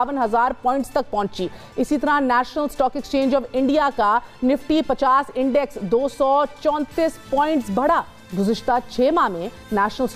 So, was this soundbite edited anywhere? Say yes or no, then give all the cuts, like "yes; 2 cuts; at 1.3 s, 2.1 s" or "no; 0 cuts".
no; 0 cuts